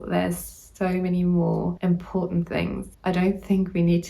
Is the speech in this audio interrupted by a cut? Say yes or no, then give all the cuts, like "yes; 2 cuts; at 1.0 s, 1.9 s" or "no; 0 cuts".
yes; 2 cuts; at 1.8 s, 2.9 s